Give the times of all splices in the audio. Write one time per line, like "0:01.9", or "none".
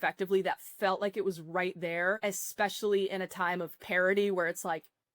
0:02.2